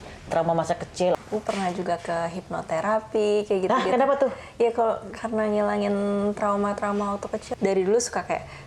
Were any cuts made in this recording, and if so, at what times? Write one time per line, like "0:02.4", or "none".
0:01.1
0:07.4